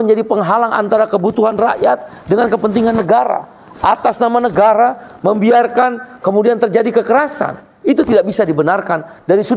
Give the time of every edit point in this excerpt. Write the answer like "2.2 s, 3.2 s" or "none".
none